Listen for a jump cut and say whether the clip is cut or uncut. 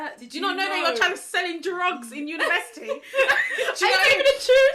uncut